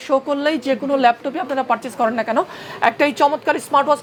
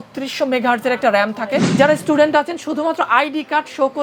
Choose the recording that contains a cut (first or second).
second